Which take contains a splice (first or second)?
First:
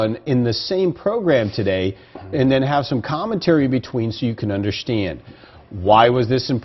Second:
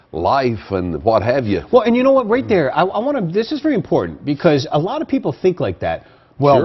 first